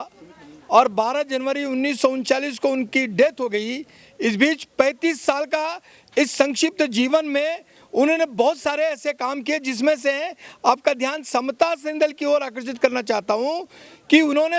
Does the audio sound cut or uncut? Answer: uncut